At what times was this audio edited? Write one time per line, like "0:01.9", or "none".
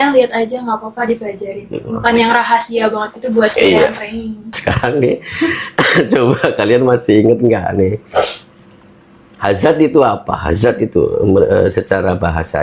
0:04.6